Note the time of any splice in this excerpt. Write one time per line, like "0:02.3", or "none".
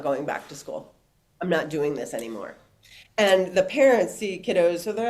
none